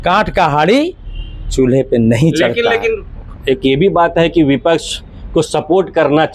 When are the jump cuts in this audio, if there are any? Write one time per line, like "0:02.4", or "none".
none

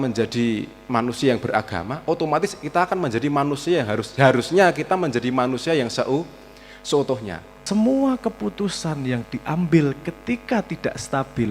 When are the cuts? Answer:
0:07.5

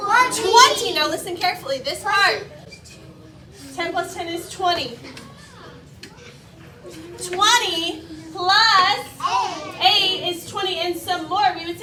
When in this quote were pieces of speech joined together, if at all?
none

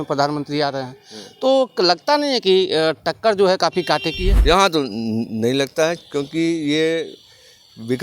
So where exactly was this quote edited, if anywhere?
0:04.3

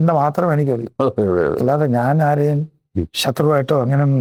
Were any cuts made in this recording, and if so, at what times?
none

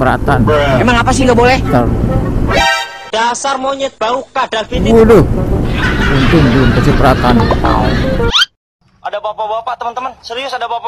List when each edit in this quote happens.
0:01.9
0:08.0

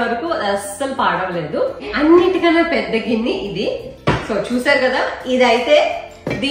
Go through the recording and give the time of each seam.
0:01.9

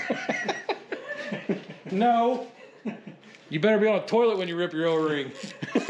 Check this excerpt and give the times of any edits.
none

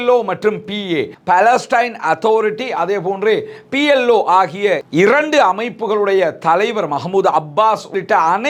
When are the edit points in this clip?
none

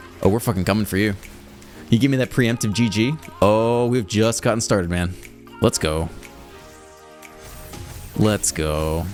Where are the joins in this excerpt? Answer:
none

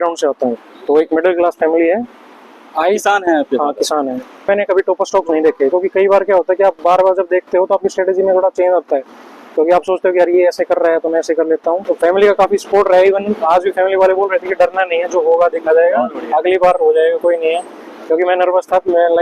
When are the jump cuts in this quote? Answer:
0:04.4
0:11.8

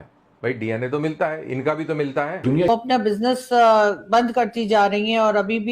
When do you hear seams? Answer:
0:02.5

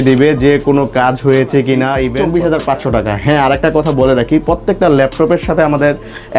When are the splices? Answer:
0:02.2

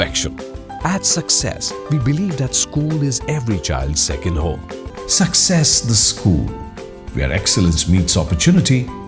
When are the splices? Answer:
0:04.9

